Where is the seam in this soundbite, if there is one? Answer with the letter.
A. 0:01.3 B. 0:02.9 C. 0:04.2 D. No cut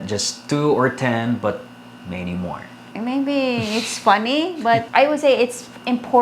B